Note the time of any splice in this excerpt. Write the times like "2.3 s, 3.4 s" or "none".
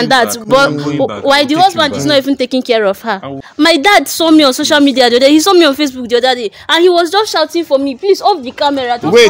3.4 s

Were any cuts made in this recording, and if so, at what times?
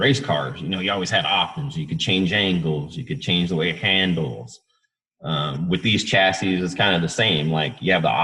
none

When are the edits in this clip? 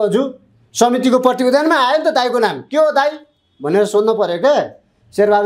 none

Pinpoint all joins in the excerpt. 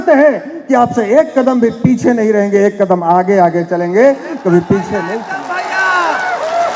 none

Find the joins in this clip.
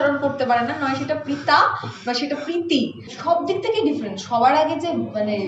3.1 s

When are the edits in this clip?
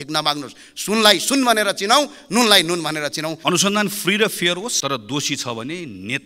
3.4 s, 4.8 s

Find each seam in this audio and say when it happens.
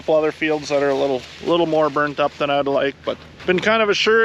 3.3 s

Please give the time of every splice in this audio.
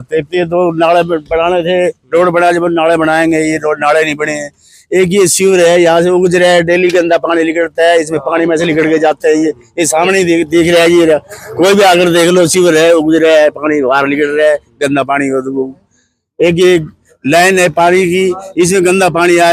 none

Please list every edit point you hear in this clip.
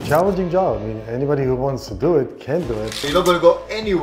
3.0 s

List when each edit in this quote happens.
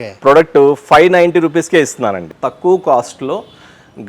2.3 s

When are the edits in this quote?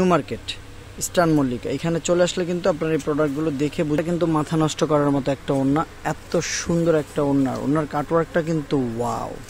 4.0 s

